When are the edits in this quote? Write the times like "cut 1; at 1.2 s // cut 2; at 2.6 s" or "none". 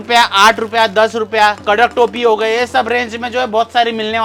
none